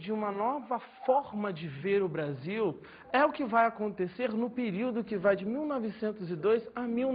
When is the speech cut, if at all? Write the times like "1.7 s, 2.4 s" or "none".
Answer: none